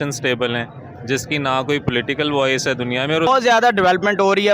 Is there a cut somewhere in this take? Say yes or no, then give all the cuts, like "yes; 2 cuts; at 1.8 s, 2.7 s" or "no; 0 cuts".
yes; 1 cut; at 3.3 s